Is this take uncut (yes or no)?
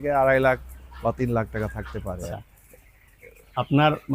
no